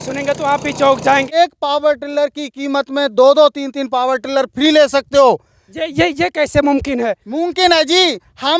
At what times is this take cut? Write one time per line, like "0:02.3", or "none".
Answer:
0:01.3